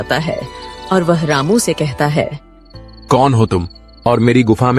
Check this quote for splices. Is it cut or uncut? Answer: uncut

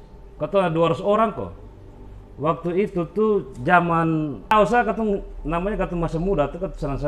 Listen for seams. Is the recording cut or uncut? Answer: cut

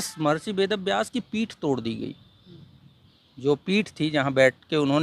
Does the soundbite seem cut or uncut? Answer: uncut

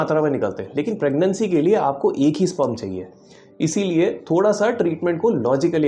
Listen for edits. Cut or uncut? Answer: uncut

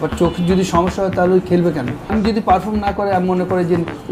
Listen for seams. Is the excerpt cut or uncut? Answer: cut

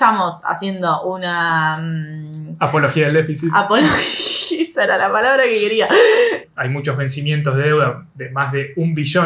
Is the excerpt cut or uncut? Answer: cut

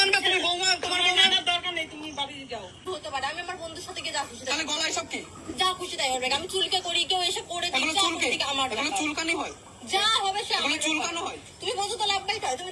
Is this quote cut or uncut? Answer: cut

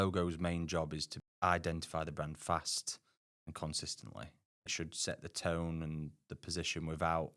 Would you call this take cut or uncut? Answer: cut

